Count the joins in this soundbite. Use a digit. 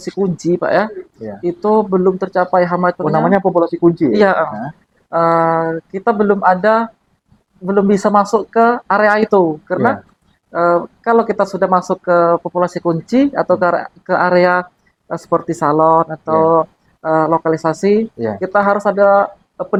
0